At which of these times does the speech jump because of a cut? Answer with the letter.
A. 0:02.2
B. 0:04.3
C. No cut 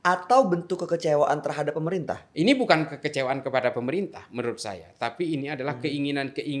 A